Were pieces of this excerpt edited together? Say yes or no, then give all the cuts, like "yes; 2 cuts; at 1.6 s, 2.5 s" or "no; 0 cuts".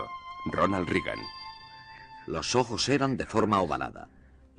yes; 1 cut; at 2.2 s